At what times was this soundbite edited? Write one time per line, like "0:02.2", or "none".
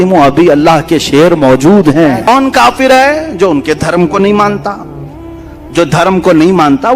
0:02.3